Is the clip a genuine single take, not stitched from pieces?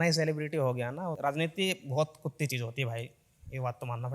no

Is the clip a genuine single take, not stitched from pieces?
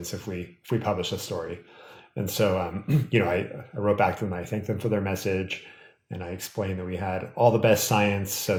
yes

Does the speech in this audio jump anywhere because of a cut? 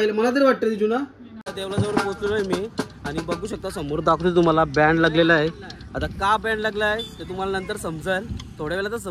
yes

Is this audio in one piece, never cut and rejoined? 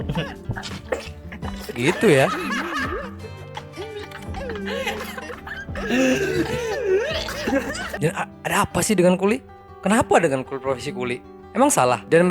no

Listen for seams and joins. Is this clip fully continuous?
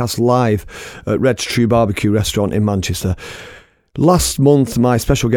yes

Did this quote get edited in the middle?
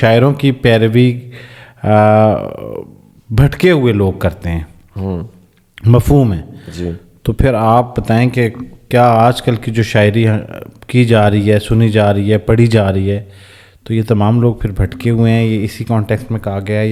no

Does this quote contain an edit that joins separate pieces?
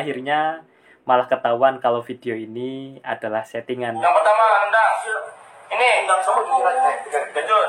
yes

